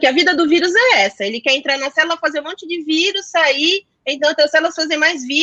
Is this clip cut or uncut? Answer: uncut